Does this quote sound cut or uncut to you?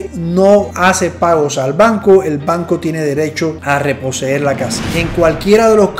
cut